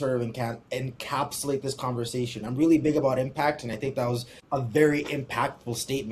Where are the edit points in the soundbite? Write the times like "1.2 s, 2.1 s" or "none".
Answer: 4.3 s